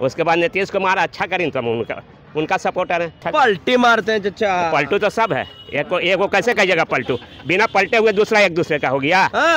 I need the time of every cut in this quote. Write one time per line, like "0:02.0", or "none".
0:03.2